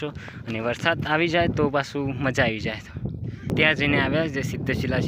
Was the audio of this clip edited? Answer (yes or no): yes